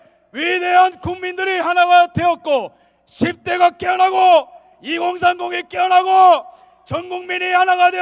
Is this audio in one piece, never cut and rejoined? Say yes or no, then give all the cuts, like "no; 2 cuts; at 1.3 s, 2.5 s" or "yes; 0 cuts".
yes; 0 cuts